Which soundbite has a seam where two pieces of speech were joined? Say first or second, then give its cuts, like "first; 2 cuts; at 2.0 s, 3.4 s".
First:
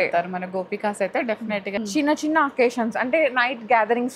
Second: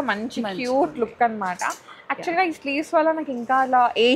first; 1 cut; at 1.8 s